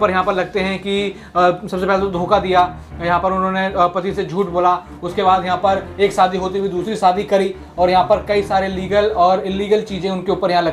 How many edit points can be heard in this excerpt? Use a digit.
0